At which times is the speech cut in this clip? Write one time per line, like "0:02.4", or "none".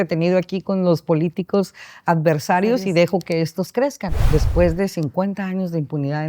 0:04.2